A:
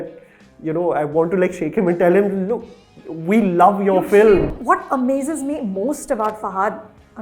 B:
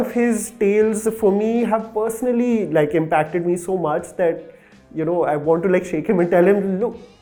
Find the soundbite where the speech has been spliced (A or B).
A